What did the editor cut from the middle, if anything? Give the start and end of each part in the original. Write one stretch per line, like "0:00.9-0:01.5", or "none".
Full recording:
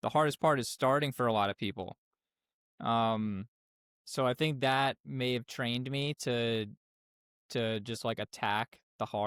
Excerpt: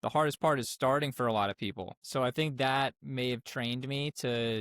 0:01.9-0:03.9